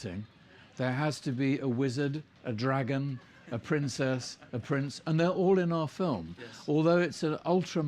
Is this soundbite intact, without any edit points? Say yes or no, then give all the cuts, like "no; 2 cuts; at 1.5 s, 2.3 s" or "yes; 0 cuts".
no; 1 cut; at 1.5 s